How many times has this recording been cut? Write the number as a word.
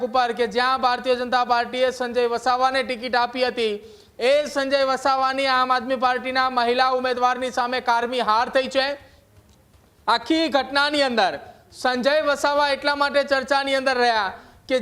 zero